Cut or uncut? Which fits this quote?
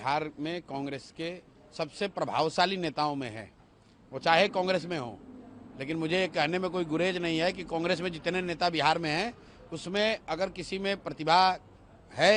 uncut